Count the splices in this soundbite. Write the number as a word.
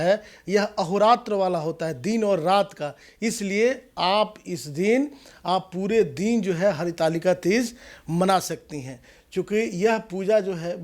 zero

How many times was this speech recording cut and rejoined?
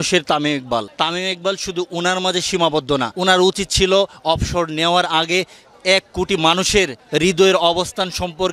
three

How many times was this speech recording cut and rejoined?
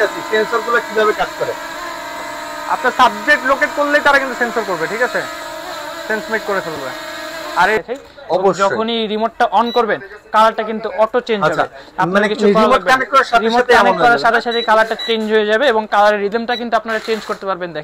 one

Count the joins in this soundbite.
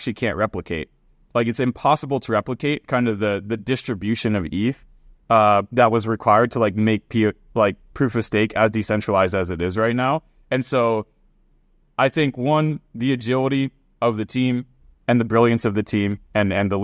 zero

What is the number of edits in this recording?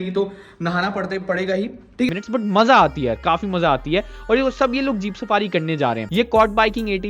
two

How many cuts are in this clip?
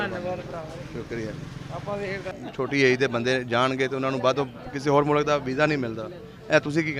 one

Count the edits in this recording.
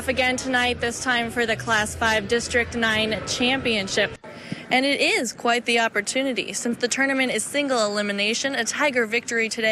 one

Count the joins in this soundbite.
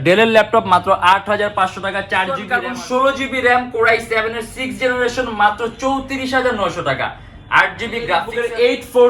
two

